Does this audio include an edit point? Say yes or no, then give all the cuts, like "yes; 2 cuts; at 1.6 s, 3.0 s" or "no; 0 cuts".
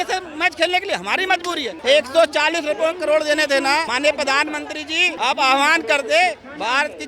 yes; 3 cuts; at 1.7 s, 3.9 s, 5.1 s